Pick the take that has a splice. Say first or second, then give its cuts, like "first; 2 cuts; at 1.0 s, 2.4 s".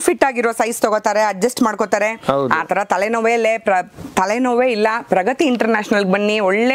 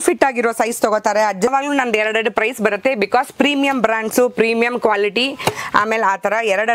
second; 1 cut; at 1.5 s